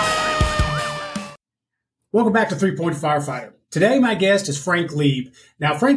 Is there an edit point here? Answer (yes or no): yes